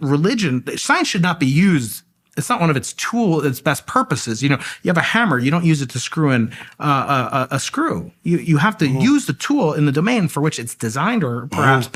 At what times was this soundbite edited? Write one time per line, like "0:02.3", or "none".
none

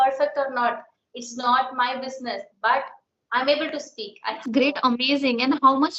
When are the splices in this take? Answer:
0:04.4

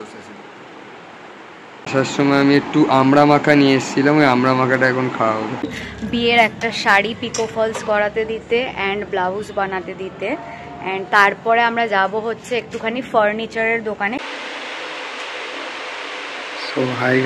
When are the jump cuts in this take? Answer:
0:01.9
0:05.8
0:14.2

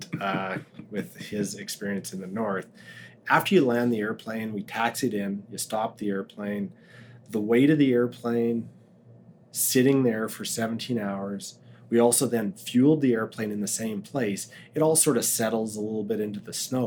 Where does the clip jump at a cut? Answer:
none

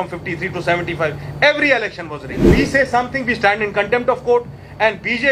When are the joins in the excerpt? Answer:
0:02.4

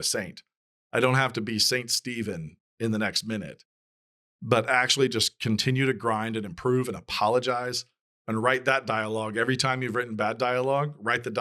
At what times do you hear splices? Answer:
none

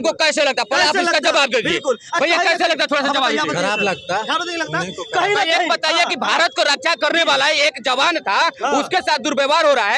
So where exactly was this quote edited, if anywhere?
none

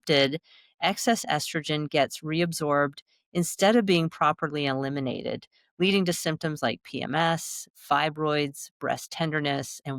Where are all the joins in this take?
none

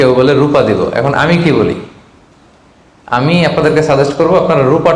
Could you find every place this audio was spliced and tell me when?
none

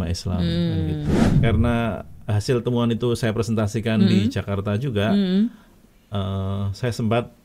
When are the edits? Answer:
0:01.3

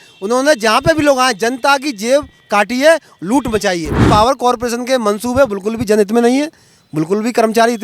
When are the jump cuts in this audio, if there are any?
0:04.0

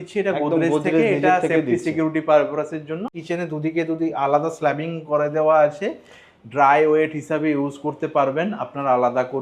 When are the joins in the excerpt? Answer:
0:03.1

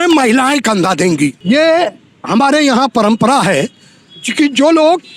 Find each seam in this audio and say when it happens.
0:01.4

